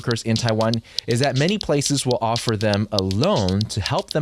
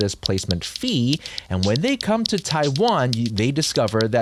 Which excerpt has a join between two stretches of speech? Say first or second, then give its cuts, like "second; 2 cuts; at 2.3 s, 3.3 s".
first; 1 cut; at 0.9 s